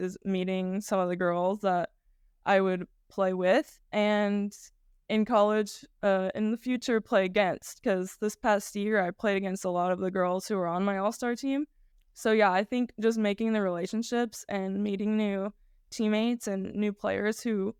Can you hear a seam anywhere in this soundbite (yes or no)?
no